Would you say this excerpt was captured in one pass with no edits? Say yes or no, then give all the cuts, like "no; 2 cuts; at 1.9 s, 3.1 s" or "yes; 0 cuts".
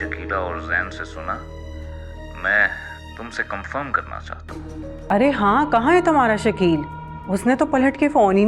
no; 1 cut; at 5.1 s